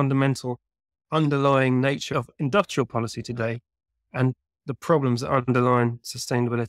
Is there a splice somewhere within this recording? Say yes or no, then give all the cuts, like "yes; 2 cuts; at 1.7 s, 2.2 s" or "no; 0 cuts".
yes; 1 cut; at 2.1 s